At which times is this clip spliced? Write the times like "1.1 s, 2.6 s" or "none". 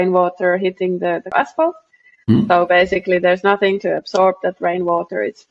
1.3 s